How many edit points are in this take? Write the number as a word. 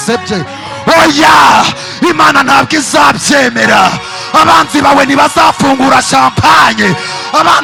zero